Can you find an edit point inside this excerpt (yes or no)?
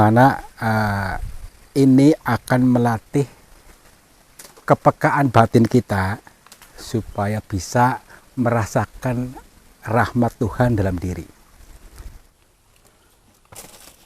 yes